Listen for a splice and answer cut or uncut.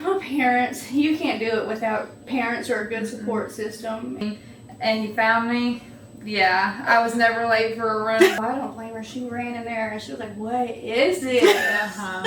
cut